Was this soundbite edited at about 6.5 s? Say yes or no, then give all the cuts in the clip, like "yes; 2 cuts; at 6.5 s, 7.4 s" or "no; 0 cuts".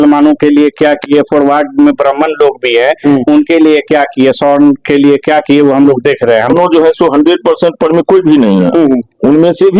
yes; 1 cut; at 6.5 s